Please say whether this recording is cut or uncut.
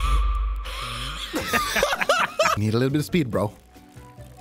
cut